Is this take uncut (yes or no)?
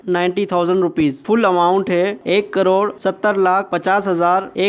yes